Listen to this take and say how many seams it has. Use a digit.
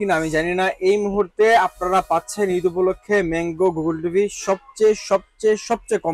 0